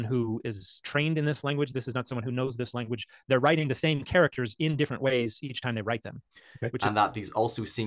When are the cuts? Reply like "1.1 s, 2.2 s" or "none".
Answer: none